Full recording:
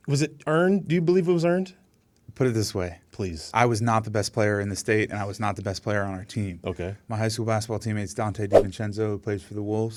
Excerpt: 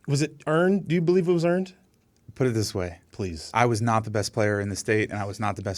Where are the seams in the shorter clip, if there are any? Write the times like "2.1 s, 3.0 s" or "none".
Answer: none